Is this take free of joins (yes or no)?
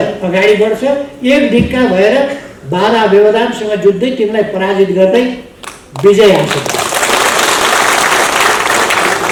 yes